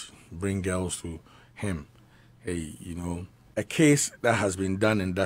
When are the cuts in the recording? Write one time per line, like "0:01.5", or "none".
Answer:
0:03.4